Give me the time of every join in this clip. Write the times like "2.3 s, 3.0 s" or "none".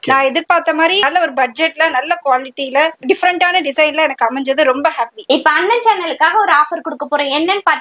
1.1 s, 3.0 s, 5.2 s